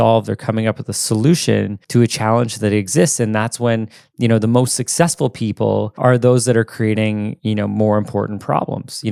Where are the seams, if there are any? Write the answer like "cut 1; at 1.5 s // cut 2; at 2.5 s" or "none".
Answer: none